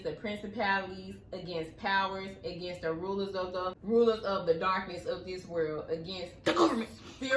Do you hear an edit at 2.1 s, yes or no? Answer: no